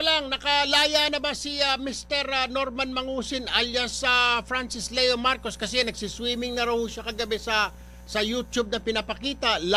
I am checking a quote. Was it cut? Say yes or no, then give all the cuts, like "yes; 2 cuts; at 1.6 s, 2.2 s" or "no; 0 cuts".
no; 0 cuts